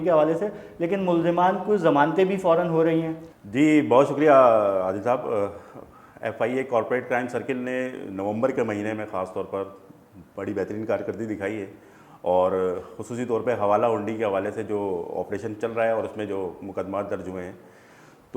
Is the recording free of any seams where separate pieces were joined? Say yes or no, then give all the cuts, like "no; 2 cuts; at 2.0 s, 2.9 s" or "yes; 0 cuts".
yes; 0 cuts